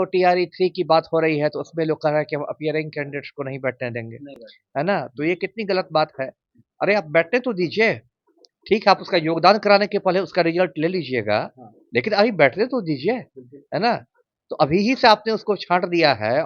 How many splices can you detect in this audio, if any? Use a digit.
0